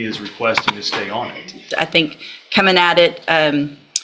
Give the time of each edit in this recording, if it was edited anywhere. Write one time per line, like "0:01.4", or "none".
0:01.6

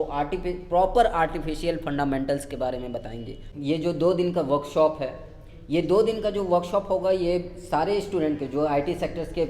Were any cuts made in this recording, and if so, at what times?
0:03.4

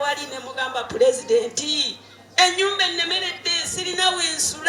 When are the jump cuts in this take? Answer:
none

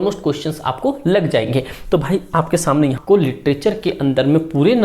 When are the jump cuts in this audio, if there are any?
0:03.0

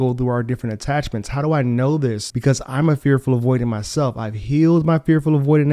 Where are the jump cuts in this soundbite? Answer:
none

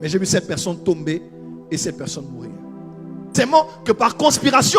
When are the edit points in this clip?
0:03.3

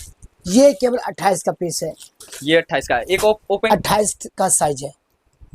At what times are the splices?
0:03.7

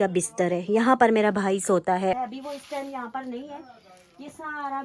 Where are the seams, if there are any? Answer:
0:02.2

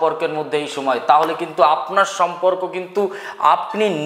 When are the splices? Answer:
none

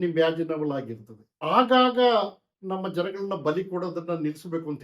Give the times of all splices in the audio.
0:01.3
0:02.5

